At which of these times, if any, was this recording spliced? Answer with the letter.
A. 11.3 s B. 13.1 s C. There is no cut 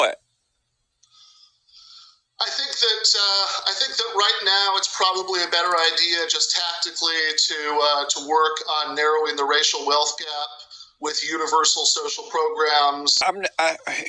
B